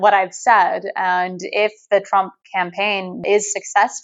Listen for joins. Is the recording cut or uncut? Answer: uncut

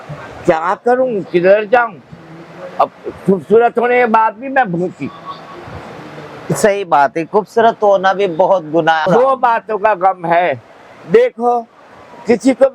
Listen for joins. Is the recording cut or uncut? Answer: cut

